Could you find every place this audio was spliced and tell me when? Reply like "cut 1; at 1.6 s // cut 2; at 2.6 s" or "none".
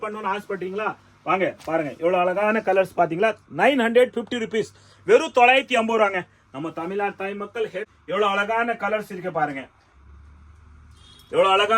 cut 1; at 7.9 s